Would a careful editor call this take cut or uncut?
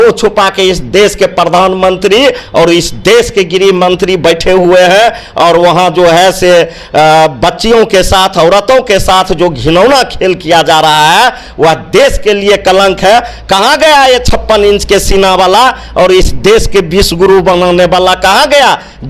uncut